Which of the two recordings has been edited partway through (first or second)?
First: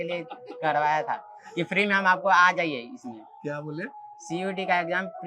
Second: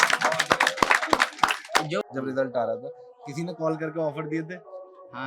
second